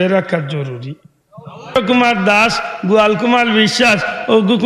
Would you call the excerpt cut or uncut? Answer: cut